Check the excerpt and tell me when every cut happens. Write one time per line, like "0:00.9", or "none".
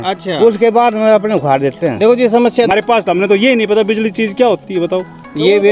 0:02.7